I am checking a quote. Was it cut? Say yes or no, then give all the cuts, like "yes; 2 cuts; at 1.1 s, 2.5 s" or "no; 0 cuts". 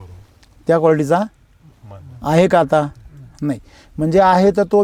no; 0 cuts